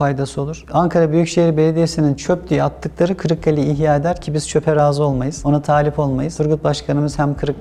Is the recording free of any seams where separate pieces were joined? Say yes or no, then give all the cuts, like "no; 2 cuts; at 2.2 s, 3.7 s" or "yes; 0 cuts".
yes; 0 cuts